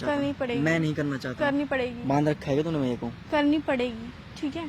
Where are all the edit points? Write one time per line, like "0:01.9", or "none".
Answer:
none